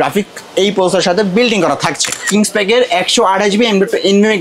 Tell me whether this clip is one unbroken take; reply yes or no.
no